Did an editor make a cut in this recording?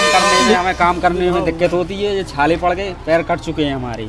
no; 0 cuts

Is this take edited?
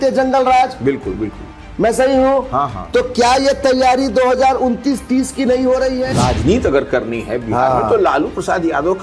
yes; 1 cut; at 6.1 s

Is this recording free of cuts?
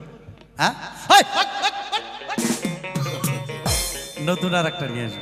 yes; 0 cuts

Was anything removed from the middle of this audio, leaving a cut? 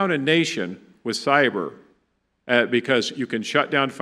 no; 0 cuts

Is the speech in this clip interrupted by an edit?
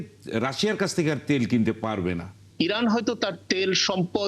yes; 1 cut; at 2.4 s

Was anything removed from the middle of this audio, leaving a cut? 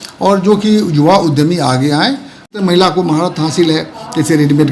yes; 1 cut; at 2.5 s

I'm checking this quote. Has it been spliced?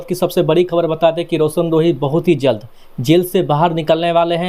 no; 0 cuts

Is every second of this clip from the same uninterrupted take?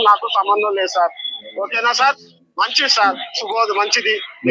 yes; 0 cuts

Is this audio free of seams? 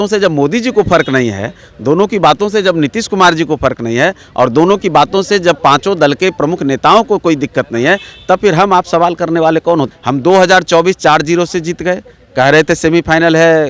no; 1 cut; at 9.9 s

